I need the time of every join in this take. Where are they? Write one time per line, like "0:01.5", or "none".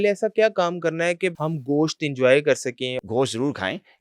0:01.4
0:03.0